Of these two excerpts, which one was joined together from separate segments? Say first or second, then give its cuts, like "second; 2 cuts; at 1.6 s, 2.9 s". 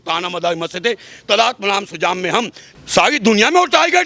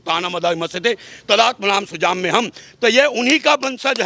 first; 1 cut; at 2.6 s